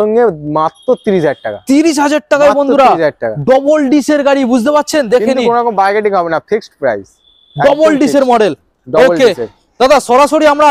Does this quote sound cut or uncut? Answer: uncut